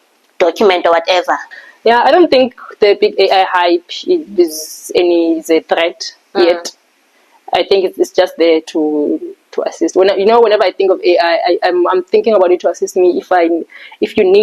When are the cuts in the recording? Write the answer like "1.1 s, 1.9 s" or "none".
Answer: 1.5 s